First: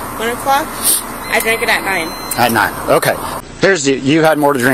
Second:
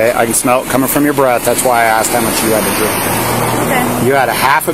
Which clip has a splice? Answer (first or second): first